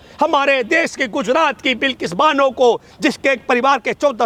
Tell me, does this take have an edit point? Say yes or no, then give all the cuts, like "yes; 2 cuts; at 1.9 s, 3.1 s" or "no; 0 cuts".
no; 0 cuts